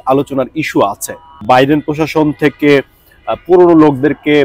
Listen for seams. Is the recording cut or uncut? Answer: cut